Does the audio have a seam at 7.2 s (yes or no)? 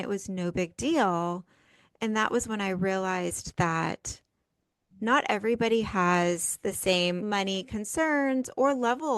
yes